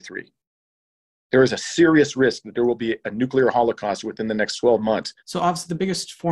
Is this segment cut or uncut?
cut